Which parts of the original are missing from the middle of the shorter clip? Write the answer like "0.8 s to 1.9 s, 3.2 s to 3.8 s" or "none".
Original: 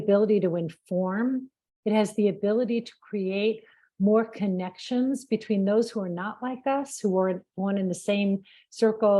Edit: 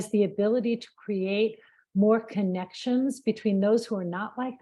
none